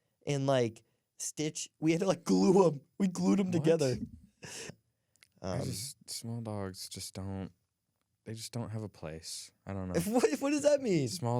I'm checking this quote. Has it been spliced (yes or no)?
yes